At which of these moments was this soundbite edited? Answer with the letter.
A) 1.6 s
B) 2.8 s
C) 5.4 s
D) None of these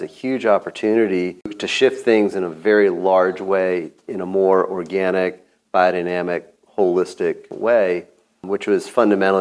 A